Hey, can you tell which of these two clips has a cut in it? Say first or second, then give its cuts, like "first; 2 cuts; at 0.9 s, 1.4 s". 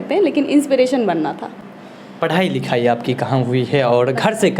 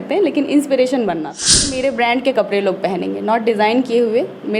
second; 1 cut; at 1.7 s